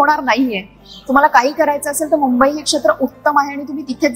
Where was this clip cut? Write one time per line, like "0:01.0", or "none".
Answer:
none